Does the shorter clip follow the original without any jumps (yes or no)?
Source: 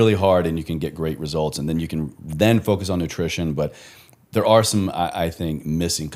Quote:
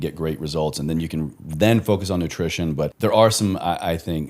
no